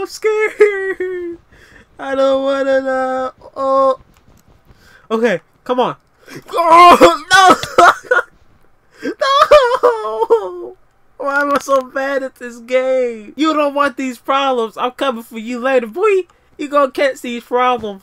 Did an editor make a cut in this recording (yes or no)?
yes